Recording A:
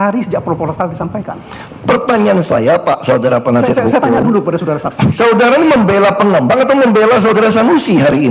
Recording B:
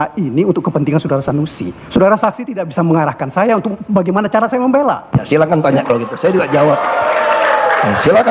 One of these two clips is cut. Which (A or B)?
A